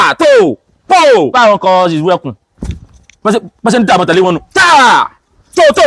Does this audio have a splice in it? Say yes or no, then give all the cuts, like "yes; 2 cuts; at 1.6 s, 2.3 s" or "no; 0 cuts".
yes; 1 cut; at 1.3 s